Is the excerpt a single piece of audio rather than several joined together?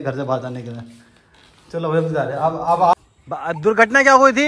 no; 1 cut; at 2.9 s

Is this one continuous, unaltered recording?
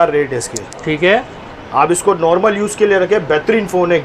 yes; 0 cuts

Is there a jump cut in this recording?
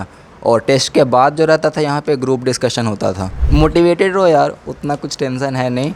yes; 1 cut; at 3.3 s

